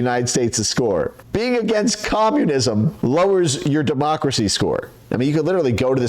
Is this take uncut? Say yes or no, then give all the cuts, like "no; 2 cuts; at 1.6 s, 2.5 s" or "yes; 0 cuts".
no; 3 cuts; at 1.2 s, 2.9 s, 5.0 s